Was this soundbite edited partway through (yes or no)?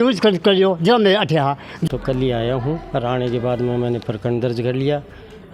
yes